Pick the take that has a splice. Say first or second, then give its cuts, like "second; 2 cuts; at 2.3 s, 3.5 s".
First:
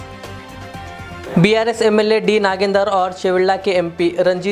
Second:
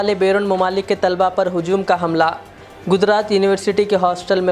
first; 1 cut; at 1.2 s